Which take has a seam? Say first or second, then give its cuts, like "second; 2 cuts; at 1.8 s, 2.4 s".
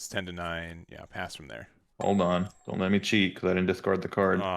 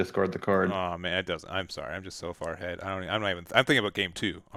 first; 2 cuts; at 1.8 s, 2.6 s